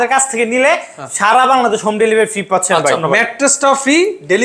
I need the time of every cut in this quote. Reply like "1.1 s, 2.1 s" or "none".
3.0 s